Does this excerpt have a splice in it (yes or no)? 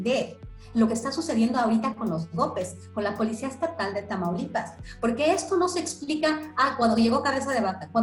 no